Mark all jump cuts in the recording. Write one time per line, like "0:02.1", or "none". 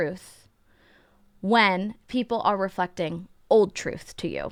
none